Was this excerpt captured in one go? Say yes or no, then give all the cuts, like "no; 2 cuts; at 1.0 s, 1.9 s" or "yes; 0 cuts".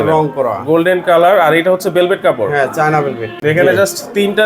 no; 1 cut; at 3.3 s